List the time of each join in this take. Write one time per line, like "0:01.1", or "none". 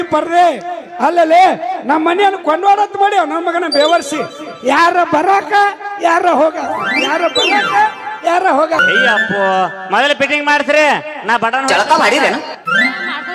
0:08.8